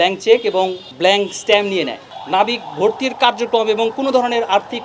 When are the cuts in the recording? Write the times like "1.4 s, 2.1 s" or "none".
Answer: 0.8 s, 2.1 s